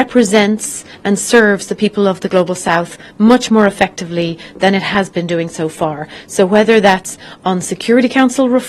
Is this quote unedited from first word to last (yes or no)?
yes